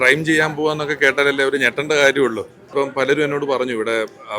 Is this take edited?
yes; 1 cut; at 2.7 s

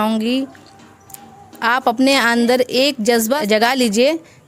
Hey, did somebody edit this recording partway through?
yes; 1 cut; at 3.4 s

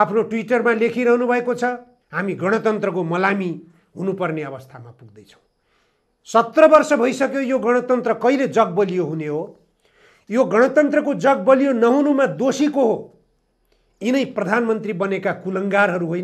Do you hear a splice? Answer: no; 0 cuts

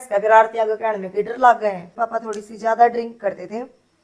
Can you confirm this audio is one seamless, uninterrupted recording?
no; 1 cut; at 1.9 s

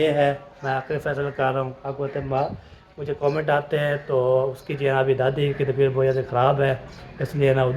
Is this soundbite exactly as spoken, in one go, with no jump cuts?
yes; 0 cuts

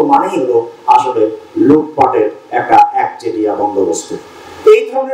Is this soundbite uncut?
yes; 0 cuts

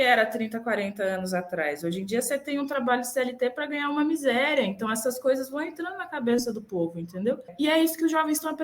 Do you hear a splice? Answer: yes; 1 cut; at 7.5 s

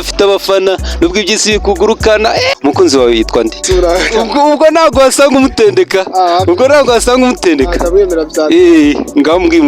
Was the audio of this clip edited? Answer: yes; 2 cuts; at 2.5 s, 3.6 s

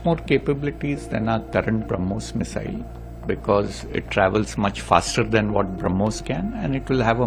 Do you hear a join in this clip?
no; 0 cuts

